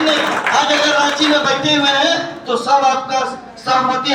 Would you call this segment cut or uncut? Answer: uncut